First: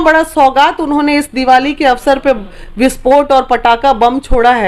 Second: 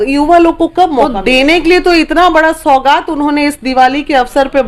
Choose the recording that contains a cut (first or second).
second